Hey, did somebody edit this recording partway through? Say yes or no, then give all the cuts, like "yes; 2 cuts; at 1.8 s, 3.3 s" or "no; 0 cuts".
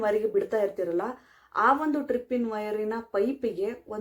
no; 0 cuts